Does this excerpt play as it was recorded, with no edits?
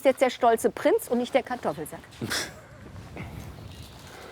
yes; 0 cuts

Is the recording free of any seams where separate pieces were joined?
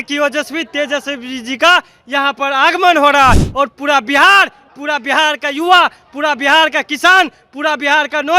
yes; 0 cuts

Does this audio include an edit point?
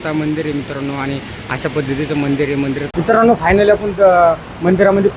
yes; 1 cut; at 2.9 s

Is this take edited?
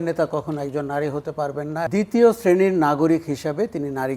yes; 1 cut; at 1.9 s

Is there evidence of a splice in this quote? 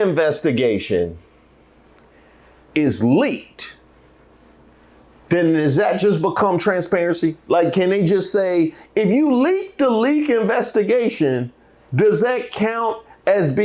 no; 0 cuts

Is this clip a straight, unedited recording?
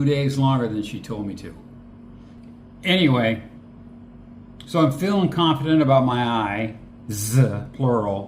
no; 1 cut; at 2.4 s

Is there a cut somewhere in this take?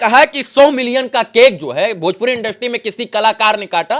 no; 0 cuts

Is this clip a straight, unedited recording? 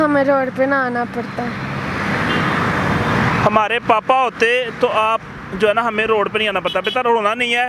yes; 0 cuts

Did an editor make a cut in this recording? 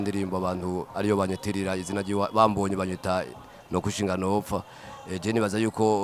no; 0 cuts

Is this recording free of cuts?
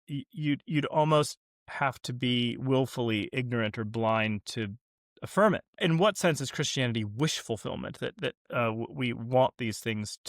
no; 1 cut; at 5.8 s

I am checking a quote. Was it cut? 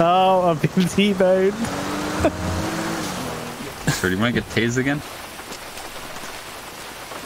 yes; 1 cut; at 3.4 s

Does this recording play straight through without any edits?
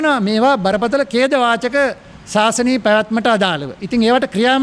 yes; 0 cuts

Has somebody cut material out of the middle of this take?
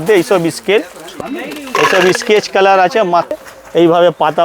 yes; 2 cuts; at 1.1 s, 3.3 s

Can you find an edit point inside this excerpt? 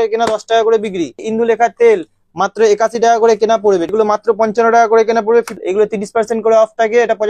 yes; 3 cuts; at 1.2 s, 3.9 s, 5.6 s

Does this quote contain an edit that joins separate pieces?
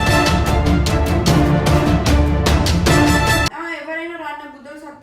yes; 1 cut; at 3.5 s

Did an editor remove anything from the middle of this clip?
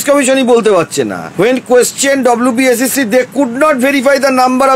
no; 0 cuts

